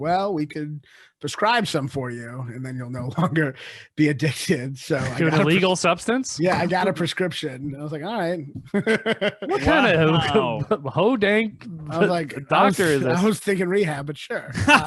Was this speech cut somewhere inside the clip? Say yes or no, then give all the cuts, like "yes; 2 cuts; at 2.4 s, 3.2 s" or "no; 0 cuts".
no; 0 cuts